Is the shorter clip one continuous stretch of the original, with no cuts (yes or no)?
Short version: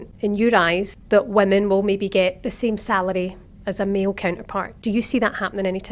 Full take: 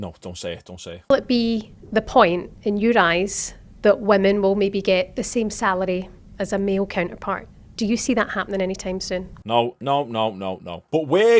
no